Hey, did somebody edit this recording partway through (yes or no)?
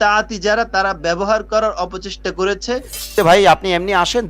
yes